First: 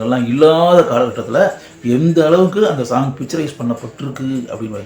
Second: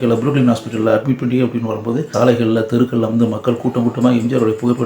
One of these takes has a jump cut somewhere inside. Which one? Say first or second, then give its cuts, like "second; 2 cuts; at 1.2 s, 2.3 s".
second; 1 cut; at 2.1 s